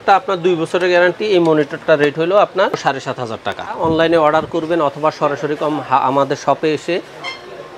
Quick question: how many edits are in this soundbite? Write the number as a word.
one